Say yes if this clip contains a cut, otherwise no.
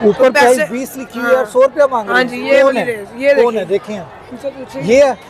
no